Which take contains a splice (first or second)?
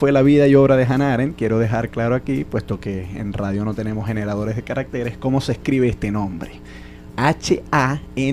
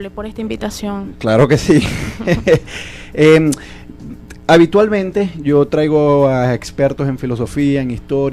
second